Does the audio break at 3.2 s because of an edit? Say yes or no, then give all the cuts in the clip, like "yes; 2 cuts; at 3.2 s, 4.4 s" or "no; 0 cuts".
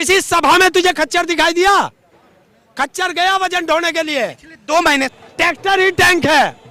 no; 1 cut; at 5.1 s